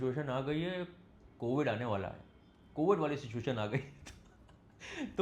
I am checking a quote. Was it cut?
no; 0 cuts

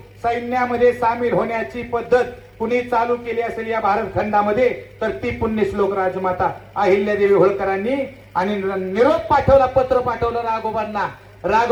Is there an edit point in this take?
no; 0 cuts

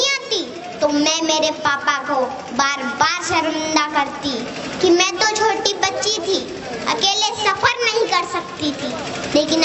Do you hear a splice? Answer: no; 0 cuts

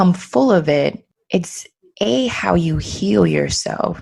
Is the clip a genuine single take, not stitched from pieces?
no; 1 cut; at 1.1 s

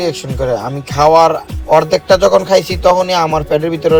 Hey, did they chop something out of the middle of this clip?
no; 0 cuts

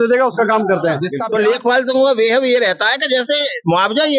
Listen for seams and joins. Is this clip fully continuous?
no; 1 cut; at 1.1 s

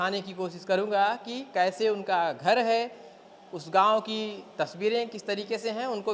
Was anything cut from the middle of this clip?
no; 0 cuts

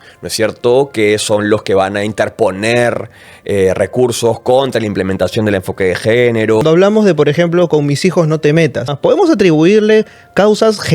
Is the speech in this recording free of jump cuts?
no; 2 cuts; at 6.6 s, 8.9 s

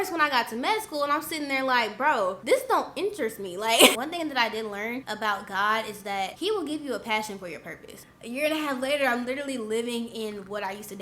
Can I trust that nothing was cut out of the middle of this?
no; 5 cuts; at 2.4 s, 4.0 s, 5.1 s, 6.3 s, 8.1 s

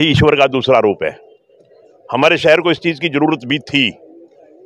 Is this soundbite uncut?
yes; 0 cuts

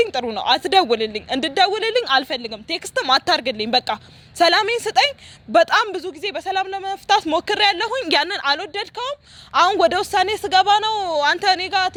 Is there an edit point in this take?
no; 0 cuts

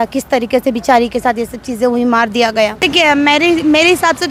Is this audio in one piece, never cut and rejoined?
no; 1 cut; at 2.8 s

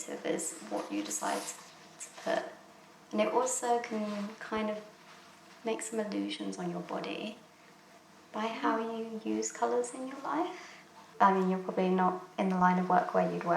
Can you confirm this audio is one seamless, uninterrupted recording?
no; 1 cut; at 11.0 s

